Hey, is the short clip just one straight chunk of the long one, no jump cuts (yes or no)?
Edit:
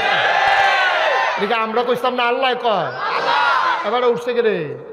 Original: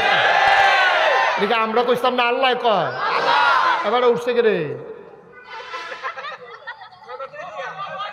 yes